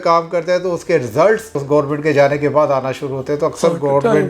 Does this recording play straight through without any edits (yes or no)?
no